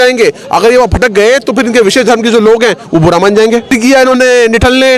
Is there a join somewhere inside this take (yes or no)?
yes